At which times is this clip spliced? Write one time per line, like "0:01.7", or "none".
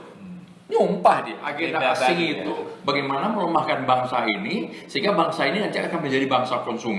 0:01.5